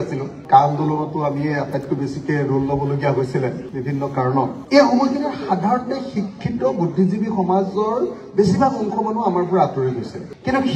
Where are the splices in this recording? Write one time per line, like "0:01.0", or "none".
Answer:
none